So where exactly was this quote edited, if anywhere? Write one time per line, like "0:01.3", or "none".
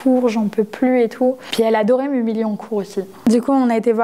0:01.4
0:03.3